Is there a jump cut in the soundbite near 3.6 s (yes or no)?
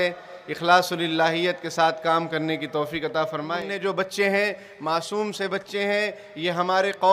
yes